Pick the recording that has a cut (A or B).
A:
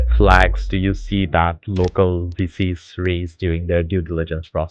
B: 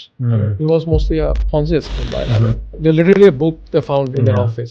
B